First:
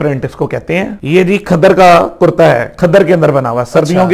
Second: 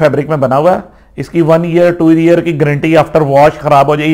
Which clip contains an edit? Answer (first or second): first